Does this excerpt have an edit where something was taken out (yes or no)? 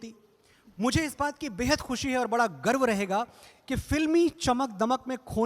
no